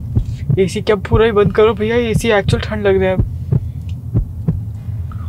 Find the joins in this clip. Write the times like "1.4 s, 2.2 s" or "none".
none